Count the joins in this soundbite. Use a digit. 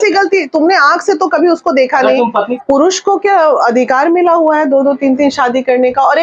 1